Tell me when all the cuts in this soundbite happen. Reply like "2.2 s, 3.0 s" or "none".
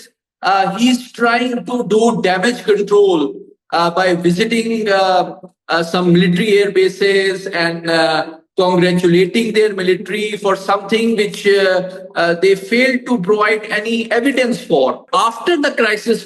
15.0 s